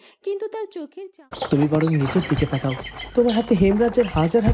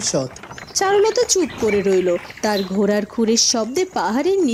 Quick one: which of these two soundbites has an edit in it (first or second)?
first